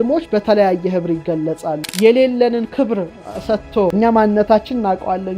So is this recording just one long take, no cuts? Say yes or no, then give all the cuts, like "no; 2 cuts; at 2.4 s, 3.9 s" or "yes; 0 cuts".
no; 2 cuts; at 1.8 s, 3.9 s